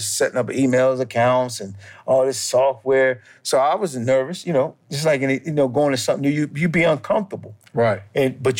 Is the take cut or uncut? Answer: uncut